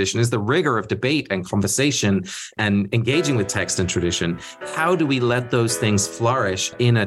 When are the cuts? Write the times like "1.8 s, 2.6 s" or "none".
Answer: 2.6 s